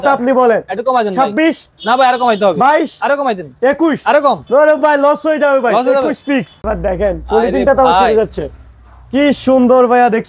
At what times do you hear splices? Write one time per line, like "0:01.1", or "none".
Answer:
0:06.6